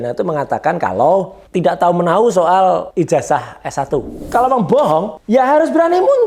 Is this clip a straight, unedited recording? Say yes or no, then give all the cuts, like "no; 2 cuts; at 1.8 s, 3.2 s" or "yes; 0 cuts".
no; 4 cuts; at 1.4 s, 2.9 s, 4.2 s, 5.2 s